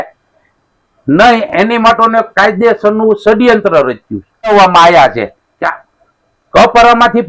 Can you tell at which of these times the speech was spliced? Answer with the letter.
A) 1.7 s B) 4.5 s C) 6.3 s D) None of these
B